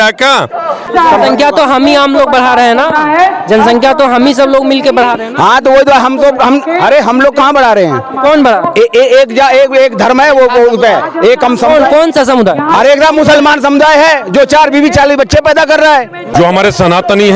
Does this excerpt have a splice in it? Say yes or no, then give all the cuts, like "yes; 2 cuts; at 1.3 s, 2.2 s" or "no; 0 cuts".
yes; 2 cuts; at 0.9 s, 16.3 s